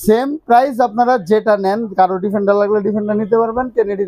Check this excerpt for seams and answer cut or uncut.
uncut